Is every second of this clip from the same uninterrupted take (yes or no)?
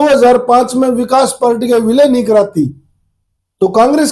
yes